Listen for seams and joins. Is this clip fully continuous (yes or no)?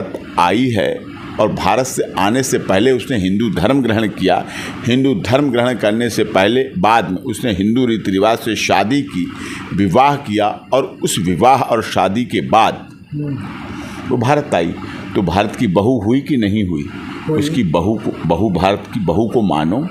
yes